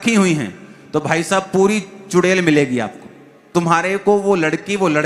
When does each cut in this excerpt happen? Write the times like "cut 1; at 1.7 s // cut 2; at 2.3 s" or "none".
cut 1; at 3.5 s